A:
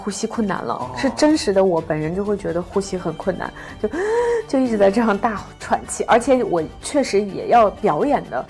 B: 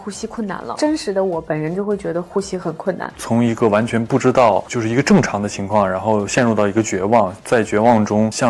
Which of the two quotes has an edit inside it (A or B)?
B